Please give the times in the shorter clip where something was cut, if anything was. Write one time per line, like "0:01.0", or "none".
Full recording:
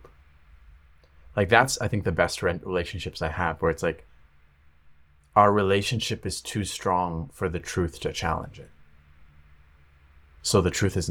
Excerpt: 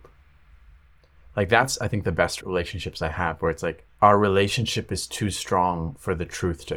0:02.4
0:03.8

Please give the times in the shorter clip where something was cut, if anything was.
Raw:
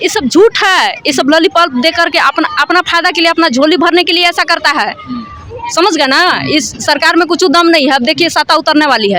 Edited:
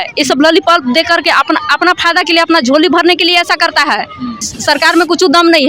0:04.5

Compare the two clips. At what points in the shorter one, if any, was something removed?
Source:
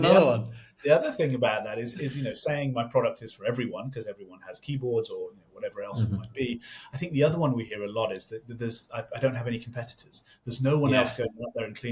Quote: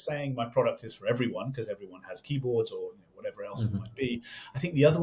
none

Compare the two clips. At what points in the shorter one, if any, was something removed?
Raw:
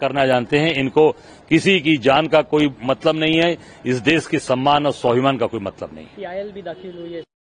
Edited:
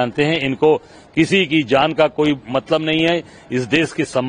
none

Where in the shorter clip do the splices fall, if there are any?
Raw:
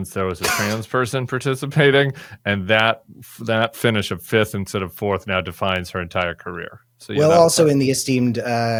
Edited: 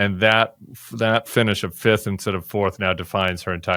none

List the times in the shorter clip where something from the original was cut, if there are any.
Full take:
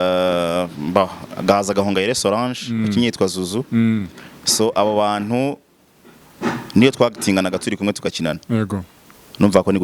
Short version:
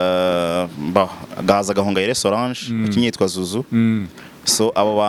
none

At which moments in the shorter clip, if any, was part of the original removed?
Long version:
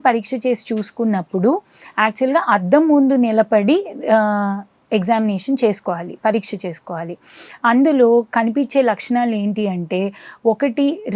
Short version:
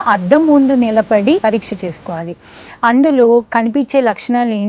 0:01.4

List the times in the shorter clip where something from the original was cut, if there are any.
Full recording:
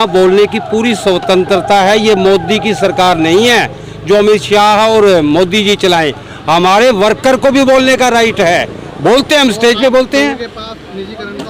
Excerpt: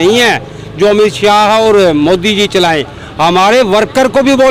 none

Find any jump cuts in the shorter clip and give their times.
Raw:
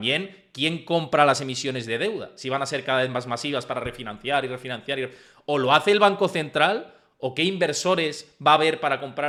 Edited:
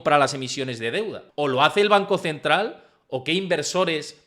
0:01.2

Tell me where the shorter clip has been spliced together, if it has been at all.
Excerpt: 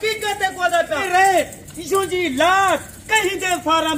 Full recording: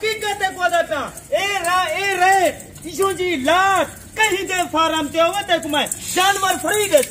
0:01.0

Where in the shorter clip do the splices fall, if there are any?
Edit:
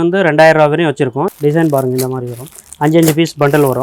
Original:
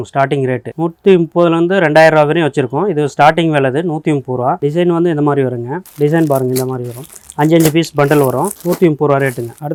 0:01.3

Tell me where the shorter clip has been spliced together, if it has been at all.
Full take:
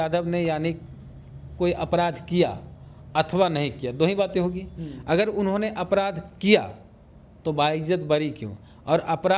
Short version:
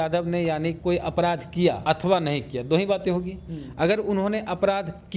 0:00.8
0:01.8

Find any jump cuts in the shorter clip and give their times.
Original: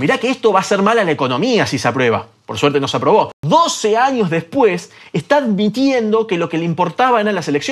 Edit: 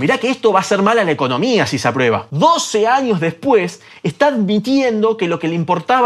0:02.3

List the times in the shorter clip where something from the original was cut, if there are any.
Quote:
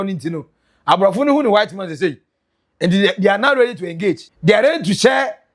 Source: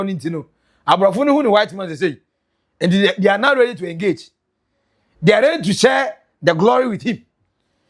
0:04.3

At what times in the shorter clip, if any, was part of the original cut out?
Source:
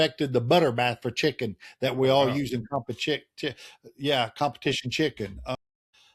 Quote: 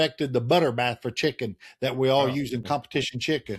0:02.6

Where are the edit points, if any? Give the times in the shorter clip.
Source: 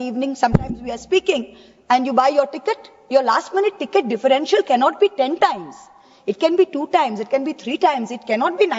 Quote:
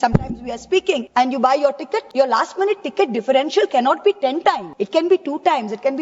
0:01.1
0:02.1
0:04.7

